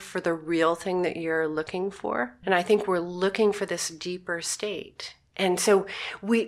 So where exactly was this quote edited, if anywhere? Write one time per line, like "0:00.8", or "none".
0:02.4